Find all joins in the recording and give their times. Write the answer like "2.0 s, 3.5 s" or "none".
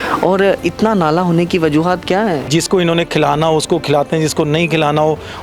2.5 s